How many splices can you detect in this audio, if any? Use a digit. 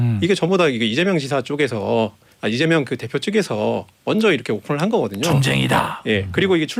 0